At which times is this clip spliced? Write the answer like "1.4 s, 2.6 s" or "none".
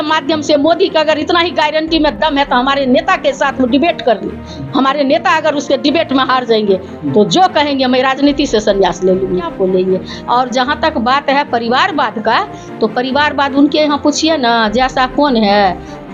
9.5 s

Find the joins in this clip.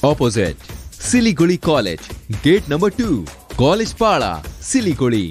none

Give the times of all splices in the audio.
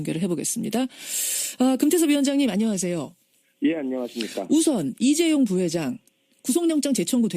1.5 s

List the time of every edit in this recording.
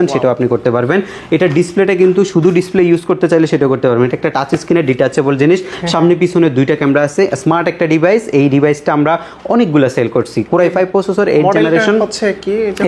none

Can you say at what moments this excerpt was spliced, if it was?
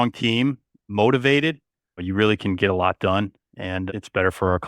2.0 s, 3.8 s

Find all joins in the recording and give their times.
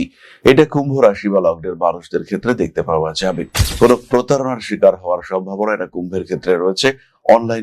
3.5 s

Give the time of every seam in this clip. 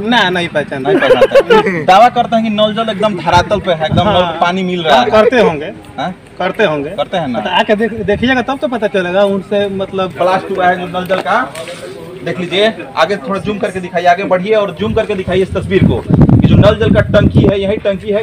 10.1 s

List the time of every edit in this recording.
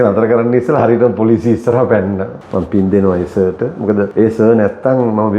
2.4 s, 4.1 s

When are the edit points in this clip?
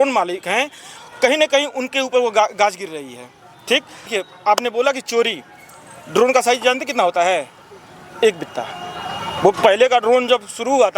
4.1 s

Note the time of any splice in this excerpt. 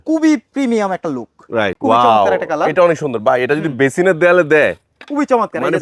1.8 s

